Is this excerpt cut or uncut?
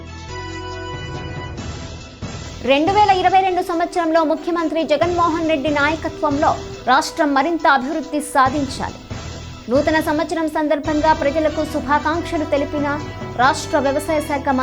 uncut